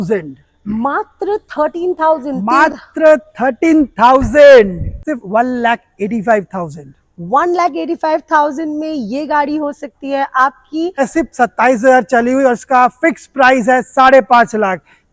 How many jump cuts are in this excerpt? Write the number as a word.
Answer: two